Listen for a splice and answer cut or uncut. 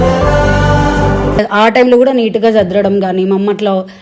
cut